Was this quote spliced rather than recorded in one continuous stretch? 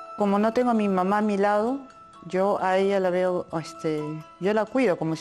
no; 0 cuts

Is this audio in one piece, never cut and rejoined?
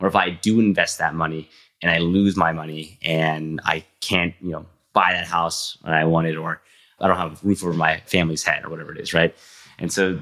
no; 2 cuts; at 6.9 s, 8.1 s

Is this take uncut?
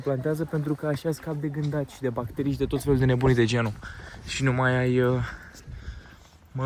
yes; 0 cuts

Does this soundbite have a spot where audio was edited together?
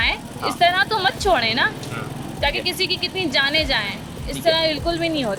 no; 0 cuts

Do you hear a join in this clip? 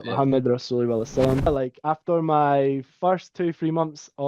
yes; 1 cut; at 1.5 s

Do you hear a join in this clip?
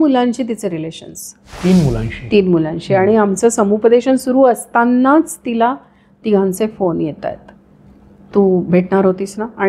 no; 0 cuts

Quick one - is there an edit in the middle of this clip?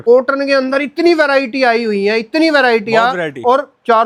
no; 0 cuts

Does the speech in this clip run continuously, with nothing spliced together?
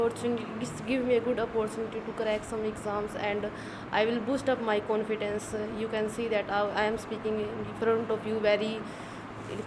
yes; 0 cuts

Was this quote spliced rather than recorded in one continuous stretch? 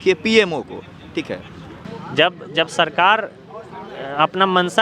yes; 1 cut; at 1.8 s

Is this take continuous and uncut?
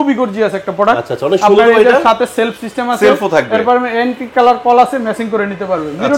yes; 0 cuts

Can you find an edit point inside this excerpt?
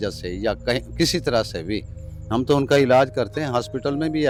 no; 0 cuts

